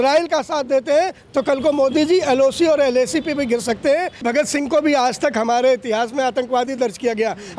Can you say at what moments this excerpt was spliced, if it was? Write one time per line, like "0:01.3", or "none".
0:04.2